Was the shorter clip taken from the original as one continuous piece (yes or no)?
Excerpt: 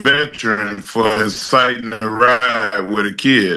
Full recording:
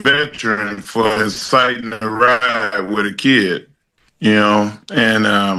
yes